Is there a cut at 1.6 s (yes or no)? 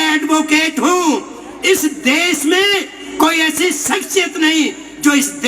no